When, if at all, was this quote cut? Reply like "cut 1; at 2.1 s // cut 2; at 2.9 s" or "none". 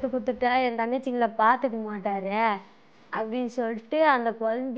none